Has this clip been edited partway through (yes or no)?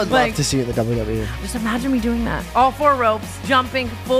yes